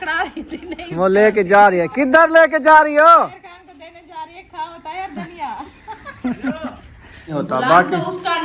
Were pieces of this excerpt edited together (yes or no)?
yes